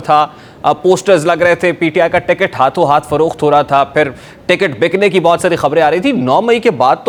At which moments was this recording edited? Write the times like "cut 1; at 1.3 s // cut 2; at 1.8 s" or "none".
none